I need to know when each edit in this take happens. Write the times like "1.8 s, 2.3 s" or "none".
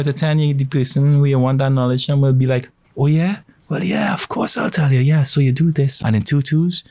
5.9 s